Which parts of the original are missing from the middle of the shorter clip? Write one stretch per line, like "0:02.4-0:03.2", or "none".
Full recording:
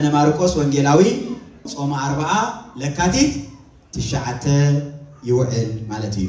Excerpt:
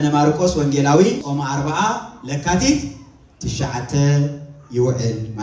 0:01.2-0:01.7